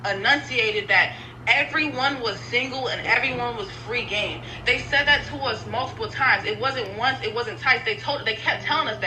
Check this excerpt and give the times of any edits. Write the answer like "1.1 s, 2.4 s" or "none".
none